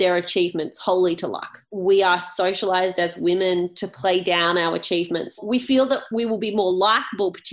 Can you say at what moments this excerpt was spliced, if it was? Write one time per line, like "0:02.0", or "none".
0:01.6
0:05.4